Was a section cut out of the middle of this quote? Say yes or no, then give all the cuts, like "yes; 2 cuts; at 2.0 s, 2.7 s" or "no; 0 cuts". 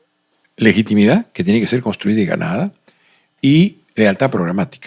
no; 0 cuts